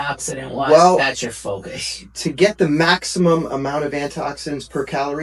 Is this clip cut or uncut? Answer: uncut